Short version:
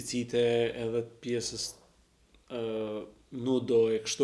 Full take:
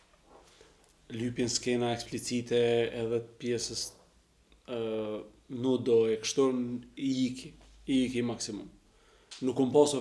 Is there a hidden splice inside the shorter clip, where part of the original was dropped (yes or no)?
no